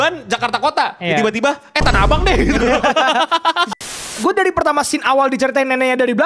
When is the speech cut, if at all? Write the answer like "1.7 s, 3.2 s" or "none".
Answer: 4.0 s